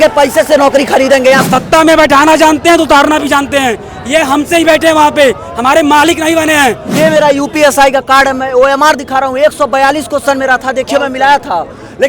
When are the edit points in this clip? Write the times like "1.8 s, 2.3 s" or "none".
1.4 s, 6.9 s